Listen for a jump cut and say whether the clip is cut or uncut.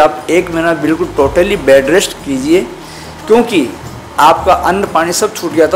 uncut